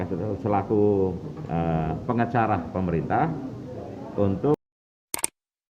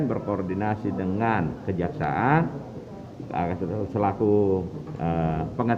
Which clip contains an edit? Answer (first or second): first